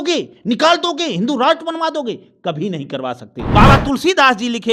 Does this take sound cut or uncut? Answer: cut